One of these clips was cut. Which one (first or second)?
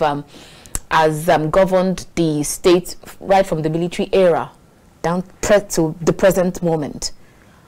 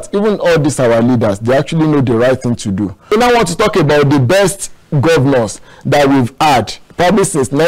second